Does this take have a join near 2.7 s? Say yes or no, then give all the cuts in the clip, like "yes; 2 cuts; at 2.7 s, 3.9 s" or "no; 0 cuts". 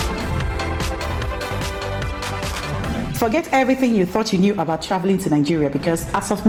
no; 0 cuts